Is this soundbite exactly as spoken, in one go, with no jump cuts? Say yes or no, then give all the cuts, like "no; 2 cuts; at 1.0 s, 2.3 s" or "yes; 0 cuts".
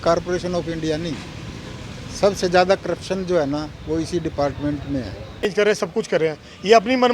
no; 1 cut; at 5.5 s